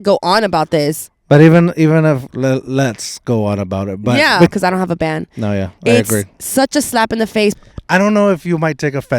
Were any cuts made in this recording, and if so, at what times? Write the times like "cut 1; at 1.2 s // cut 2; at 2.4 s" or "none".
cut 1; at 4.5 s // cut 2; at 7.5 s

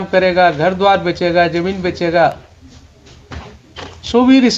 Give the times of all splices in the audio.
none

